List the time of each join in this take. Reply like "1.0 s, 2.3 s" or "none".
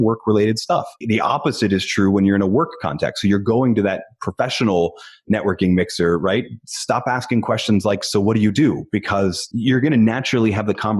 1.0 s, 9.4 s